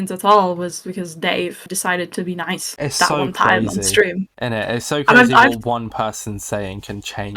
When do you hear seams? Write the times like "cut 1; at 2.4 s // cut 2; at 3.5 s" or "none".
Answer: none